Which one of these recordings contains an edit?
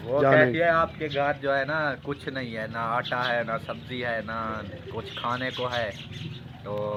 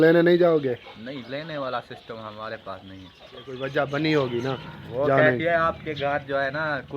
second; 1 cut; at 3.6 s

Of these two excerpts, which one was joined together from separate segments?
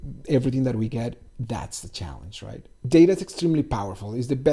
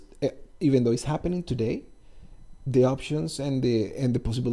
first; 1 cut; at 2.8 s

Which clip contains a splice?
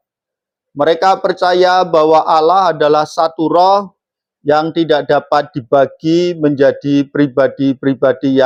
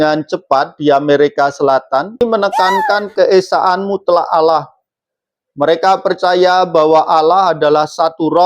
second; 1 cut; at 2.2 s

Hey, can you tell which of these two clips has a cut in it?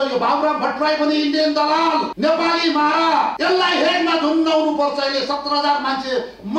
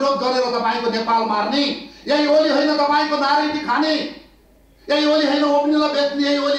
first; 2 cuts; at 2.1 s, 3.4 s

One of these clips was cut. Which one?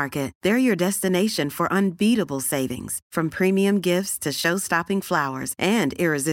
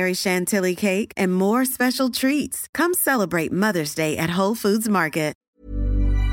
second; 1 cut; at 5.4 s

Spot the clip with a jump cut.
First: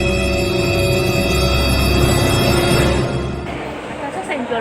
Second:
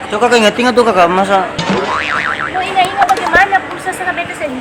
first; 1 cut; at 3.5 s

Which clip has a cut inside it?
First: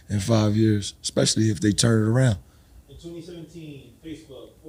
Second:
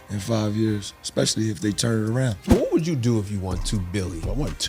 second; 1 cut; at 2.5 s

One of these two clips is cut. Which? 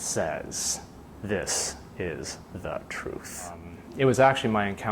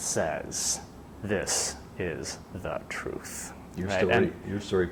first; 1 cut; at 3.6 s

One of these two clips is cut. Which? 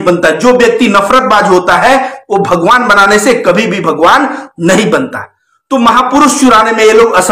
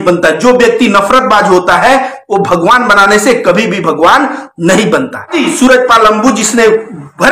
second; 1 cut; at 5.3 s

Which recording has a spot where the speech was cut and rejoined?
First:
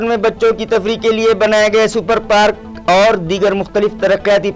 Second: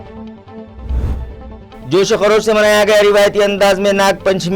second; 1 cut; at 1.1 s

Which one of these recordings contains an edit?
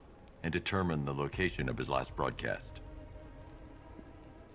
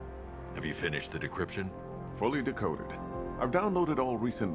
second; 1 cut; at 2.6 s

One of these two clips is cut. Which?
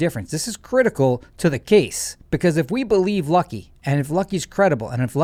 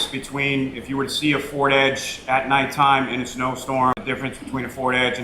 second; 1 cut; at 3.9 s

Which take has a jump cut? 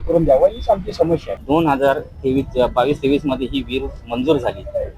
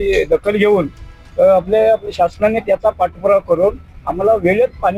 first; 1 cut; at 1.3 s

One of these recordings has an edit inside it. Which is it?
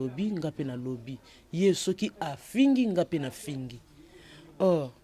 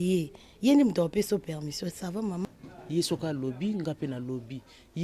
second; 1 cut; at 2.4 s

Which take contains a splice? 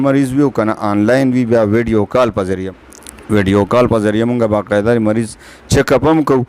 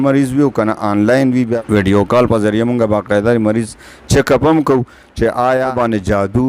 second; 2 cuts; at 1.5 s, 5.7 s

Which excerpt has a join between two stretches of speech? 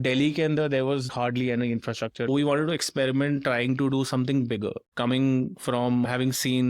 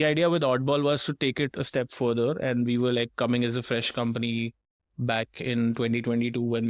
first; 3 cuts; at 1.1 s, 2.3 s, 4.9 s

